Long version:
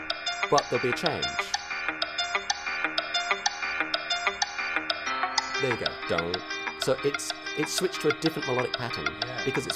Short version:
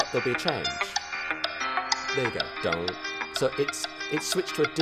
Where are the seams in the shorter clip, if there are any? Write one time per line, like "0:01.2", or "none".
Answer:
0:01.4